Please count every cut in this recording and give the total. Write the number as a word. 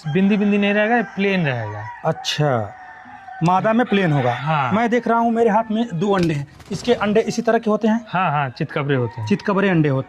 zero